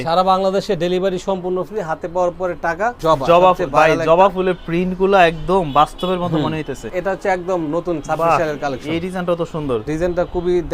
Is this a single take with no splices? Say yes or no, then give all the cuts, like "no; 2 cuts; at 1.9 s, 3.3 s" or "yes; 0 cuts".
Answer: no; 3 cuts; at 3.0 s, 6.9 s, 9.8 s